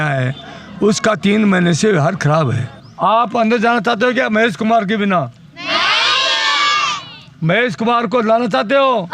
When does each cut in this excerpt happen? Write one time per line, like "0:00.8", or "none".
0:02.8